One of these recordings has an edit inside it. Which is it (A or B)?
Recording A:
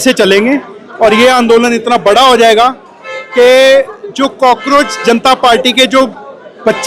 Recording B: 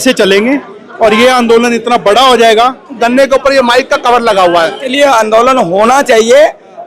B